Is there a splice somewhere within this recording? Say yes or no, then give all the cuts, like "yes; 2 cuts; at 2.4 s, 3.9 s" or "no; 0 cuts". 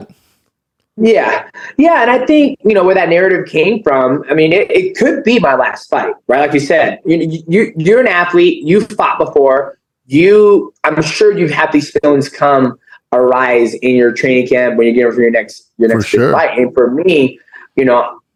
no; 0 cuts